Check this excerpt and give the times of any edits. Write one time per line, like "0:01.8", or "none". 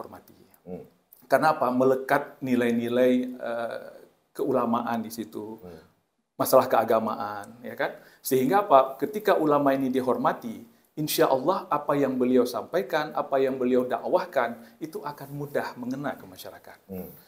none